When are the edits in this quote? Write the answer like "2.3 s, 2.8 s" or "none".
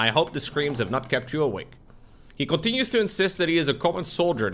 none